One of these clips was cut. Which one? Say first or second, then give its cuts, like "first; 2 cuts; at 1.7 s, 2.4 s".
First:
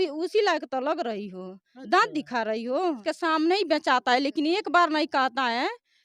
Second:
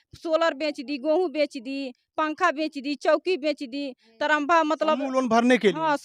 first; 1 cut; at 3.0 s